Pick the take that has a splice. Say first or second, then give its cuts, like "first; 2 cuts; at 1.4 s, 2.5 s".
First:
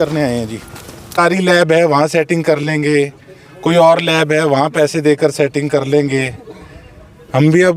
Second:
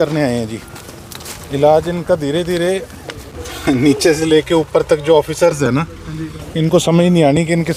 first; 1 cut; at 1.1 s